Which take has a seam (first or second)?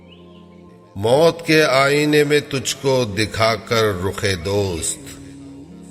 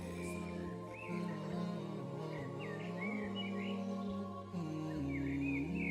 first